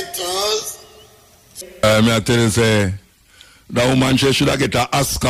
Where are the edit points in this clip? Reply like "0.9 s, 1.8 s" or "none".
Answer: 1.6 s